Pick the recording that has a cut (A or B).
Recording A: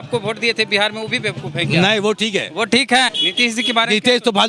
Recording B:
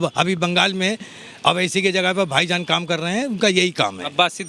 A